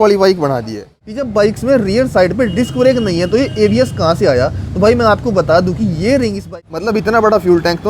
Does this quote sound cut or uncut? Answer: cut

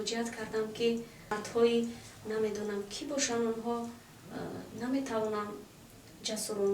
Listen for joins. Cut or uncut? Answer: cut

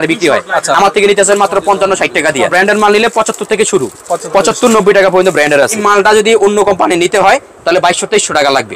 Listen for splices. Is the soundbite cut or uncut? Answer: cut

